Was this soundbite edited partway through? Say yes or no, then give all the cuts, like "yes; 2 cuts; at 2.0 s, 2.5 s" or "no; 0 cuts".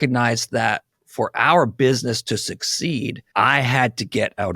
yes; 1 cut; at 3.2 s